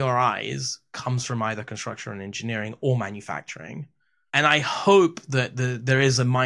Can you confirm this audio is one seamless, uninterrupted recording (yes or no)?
yes